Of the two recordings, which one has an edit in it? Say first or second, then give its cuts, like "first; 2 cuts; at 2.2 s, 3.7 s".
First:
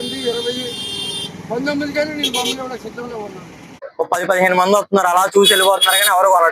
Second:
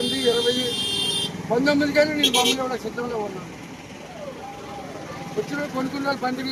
first; 1 cut; at 3.8 s